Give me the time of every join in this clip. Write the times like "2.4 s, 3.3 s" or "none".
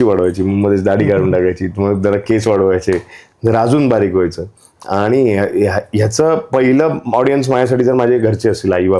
none